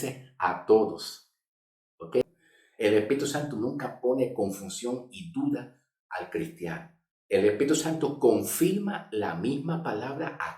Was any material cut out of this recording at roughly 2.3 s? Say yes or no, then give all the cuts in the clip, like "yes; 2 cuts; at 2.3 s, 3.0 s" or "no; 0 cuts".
yes; 1 cut; at 2.3 s